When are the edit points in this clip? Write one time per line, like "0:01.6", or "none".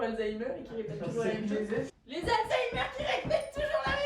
0:01.9